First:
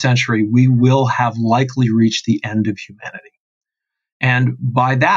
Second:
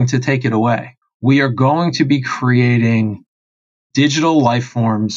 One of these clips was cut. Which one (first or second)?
second